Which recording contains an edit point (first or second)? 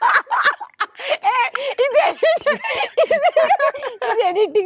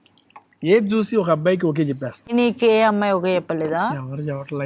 second